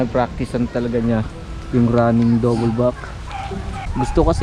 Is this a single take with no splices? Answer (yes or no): yes